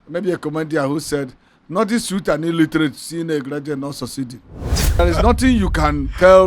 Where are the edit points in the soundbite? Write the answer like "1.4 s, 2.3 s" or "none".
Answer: 5.0 s